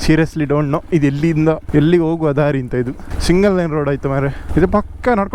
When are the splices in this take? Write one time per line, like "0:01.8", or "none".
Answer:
0:01.6
0:03.1
0:04.4